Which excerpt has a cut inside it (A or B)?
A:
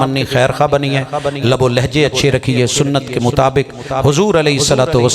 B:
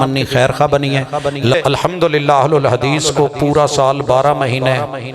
B